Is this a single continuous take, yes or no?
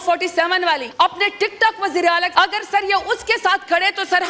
no